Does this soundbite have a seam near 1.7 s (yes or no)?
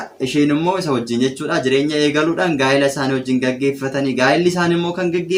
no